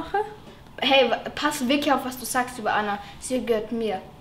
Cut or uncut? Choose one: uncut